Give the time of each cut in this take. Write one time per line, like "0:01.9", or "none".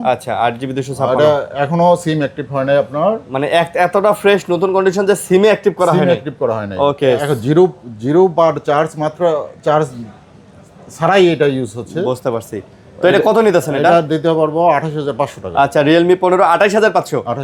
none